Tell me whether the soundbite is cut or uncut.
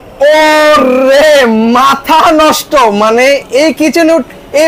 uncut